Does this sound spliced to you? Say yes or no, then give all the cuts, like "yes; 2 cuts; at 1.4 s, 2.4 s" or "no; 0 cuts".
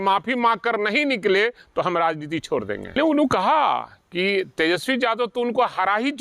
yes; 1 cut; at 3.0 s